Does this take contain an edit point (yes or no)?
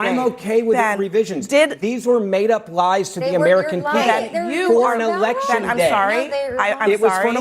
no